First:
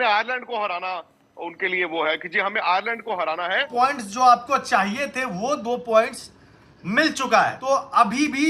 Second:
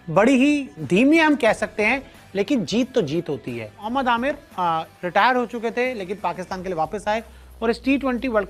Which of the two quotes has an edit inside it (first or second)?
first